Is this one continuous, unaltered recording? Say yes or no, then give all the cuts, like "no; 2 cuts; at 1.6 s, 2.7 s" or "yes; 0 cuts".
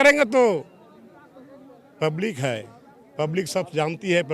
yes; 0 cuts